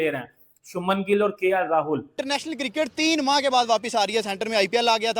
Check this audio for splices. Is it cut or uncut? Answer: cut